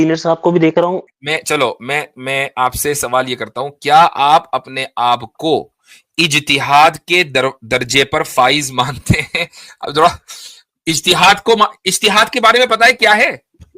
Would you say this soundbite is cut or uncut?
cut